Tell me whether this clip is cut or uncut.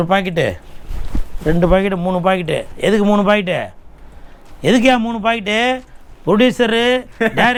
uncut